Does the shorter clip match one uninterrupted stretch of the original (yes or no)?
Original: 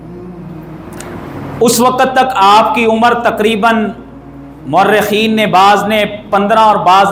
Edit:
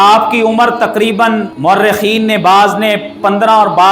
no